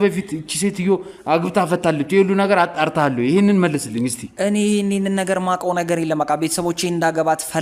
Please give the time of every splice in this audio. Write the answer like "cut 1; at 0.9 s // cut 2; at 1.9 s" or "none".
none